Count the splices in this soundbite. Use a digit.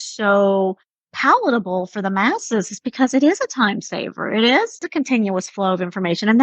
1